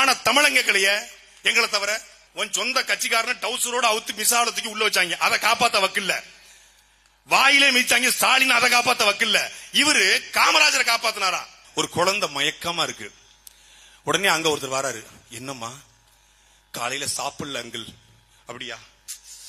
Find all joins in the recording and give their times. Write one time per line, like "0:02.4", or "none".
0:02.2
0:11.6